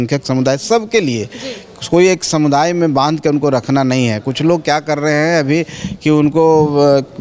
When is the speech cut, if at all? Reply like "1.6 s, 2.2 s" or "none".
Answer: none